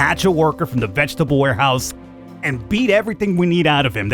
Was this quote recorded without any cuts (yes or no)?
yes